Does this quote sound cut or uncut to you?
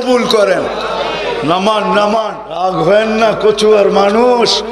cut